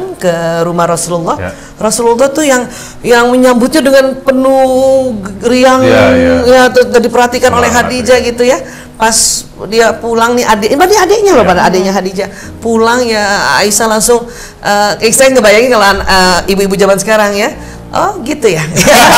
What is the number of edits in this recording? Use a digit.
0